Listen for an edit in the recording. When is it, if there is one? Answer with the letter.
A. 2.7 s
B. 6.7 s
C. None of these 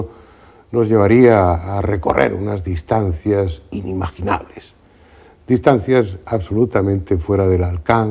B